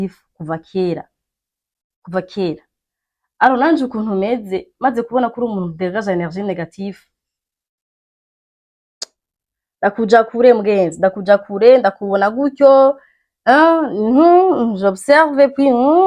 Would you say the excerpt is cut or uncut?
uncut